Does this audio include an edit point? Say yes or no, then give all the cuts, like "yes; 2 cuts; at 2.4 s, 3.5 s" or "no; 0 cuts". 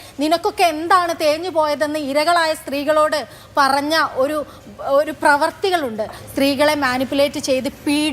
yes; 1 cut; at 6.2 s